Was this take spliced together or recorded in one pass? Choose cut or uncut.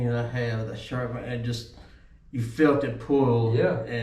uncut